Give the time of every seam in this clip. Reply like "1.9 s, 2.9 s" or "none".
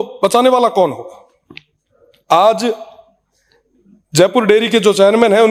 none